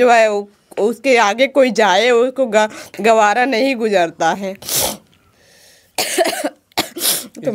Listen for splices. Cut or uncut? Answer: uncut